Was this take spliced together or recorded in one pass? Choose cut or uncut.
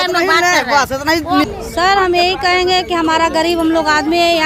cut